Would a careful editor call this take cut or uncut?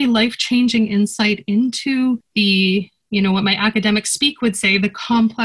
uncut